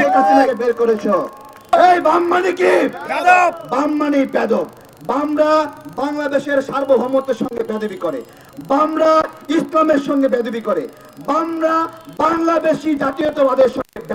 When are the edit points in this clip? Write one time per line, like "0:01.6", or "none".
0:01.7